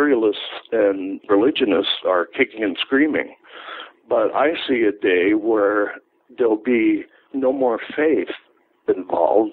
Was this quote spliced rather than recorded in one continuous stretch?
yes; 1 cut; at 1.1 s

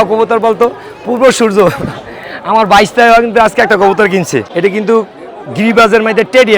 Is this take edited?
yes; 1 cut; at 4.5 s

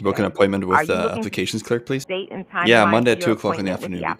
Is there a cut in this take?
yes; 1 cut; at 2.1 s

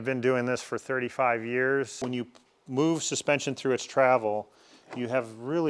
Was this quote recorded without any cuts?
no; 1 cut; at 2.0 s

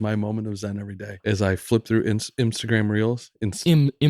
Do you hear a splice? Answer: yes; 1 cut; at 1.1 s

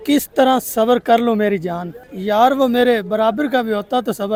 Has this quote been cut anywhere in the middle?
no; 0 cuts

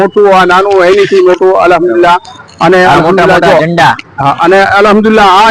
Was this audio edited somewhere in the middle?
no; 0 cuts

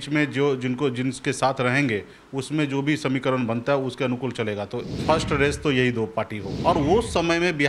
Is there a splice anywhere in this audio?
yes; 2 cuts; at 4.9 s, 6.4 s

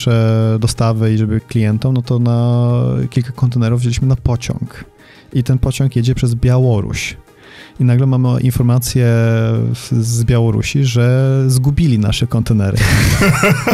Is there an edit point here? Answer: no; 0 cuts

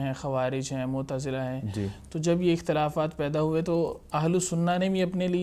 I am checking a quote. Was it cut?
no; 0 cuts

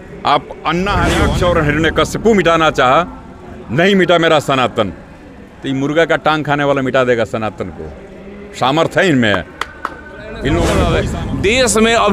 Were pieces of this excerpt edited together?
yes; 2 cuts; at 1.3 s, 11.1 s

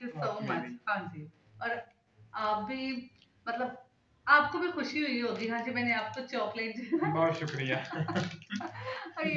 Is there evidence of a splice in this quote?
no; 0 cuts

